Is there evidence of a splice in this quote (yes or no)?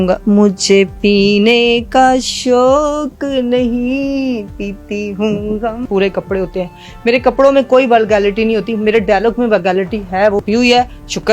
yes